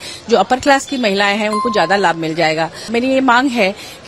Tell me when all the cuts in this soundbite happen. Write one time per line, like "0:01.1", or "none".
0:02.9

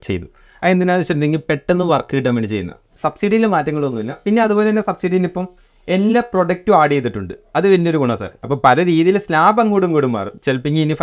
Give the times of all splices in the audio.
0:02.9
0:08.3

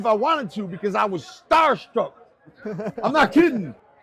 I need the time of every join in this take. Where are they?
none

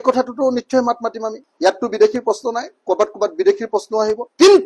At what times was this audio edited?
none

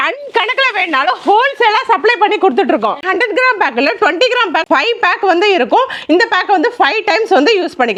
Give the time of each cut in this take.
none

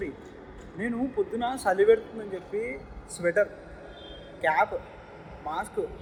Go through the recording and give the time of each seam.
none

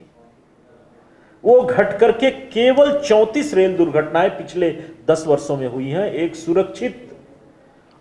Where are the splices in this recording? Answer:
none

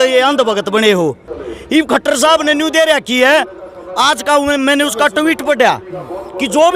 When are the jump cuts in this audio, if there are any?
0:01.3

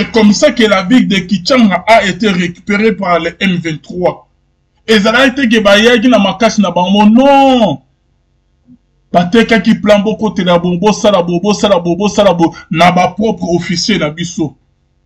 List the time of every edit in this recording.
none

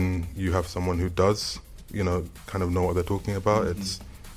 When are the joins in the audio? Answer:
none

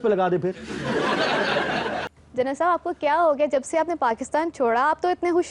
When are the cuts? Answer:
0:02.2

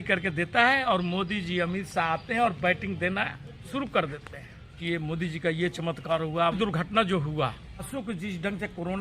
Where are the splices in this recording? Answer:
0:04.8
0:06.6
0:07.9

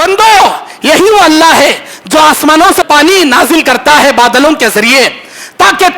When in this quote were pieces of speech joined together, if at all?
0:02.8

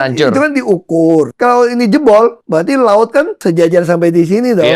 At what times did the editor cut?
0:01.3
0:02.4
0:03.3

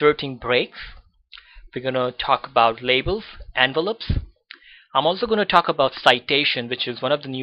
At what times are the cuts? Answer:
0:01.5

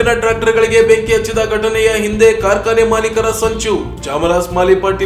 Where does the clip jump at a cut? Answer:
none

